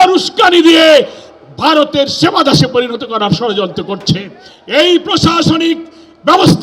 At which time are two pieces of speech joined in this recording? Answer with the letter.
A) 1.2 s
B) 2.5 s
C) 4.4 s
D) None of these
C